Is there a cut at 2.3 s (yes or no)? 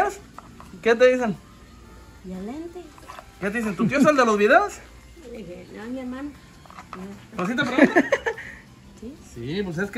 no